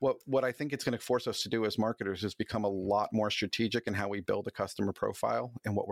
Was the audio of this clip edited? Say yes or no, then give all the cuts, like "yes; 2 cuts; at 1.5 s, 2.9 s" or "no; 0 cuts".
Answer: no; 0 cuts